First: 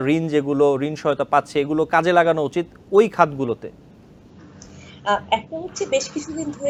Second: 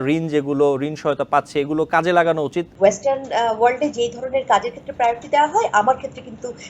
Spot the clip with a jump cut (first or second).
second